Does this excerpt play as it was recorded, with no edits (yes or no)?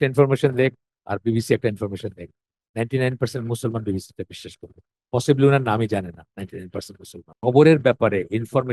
no